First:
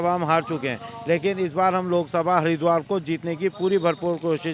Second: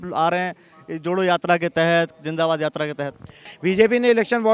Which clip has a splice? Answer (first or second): second